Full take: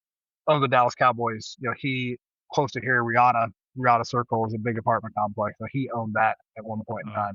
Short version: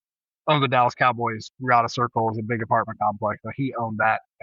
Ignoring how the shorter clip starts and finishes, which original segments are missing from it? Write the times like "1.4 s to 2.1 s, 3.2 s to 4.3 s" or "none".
1.5 s to 3.6 s